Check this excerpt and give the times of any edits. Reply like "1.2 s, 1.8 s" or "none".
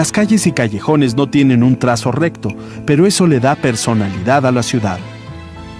3.5 s